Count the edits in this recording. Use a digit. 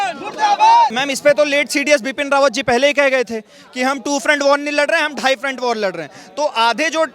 1